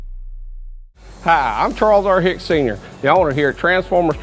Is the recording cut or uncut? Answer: cut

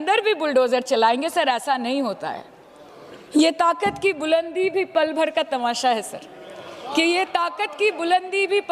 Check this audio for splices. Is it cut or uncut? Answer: uncut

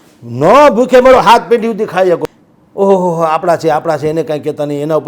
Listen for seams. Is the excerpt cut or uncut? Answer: cut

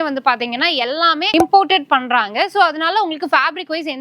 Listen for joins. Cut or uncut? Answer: cut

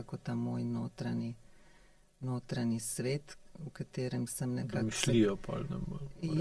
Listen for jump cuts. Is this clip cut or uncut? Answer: uncut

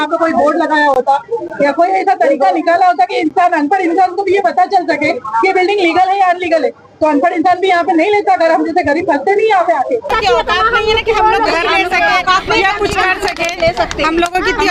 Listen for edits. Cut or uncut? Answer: uncut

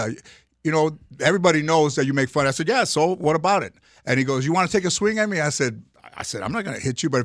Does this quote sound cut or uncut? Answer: uncut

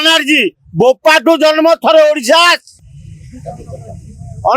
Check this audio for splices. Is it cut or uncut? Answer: uncut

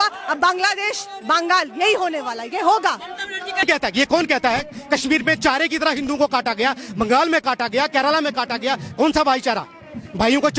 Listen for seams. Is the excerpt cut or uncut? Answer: cut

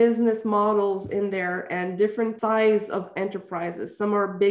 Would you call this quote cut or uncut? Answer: cut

